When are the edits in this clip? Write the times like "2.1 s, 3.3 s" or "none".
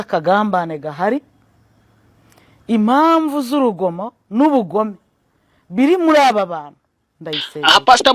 none